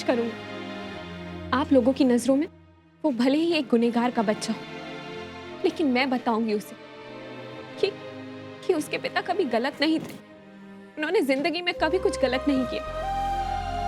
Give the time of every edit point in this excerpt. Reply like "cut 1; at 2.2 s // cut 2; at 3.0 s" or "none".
none